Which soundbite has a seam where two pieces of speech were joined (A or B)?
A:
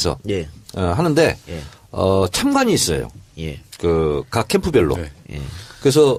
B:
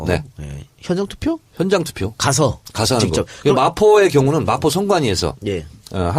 B